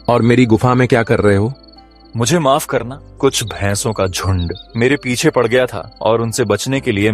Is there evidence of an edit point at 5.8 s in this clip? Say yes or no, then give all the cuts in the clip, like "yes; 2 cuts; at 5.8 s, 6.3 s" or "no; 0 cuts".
yes; 3 cuts; at 3.0 s, 4.6 s, 5.8 s